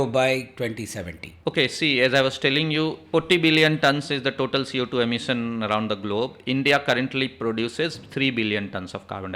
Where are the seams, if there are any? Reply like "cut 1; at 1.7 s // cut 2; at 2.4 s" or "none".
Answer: cut 1; at 1.3 s // cut 2; at 3.0 s